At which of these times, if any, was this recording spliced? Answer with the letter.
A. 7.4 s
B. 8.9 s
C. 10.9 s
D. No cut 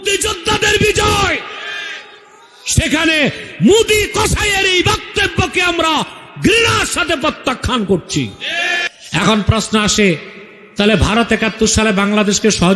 B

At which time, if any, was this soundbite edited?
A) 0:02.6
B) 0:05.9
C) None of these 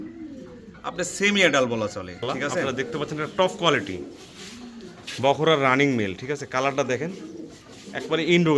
A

